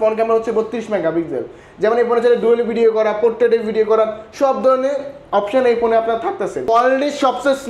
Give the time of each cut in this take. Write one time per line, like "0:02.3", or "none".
0:06.7